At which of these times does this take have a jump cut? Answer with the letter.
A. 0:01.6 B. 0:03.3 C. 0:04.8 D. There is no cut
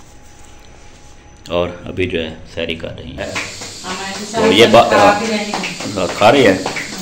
B